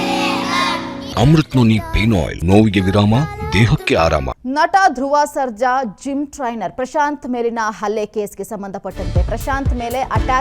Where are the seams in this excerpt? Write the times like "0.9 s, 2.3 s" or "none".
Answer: 1.0 s, 2.3 s, 4.3 s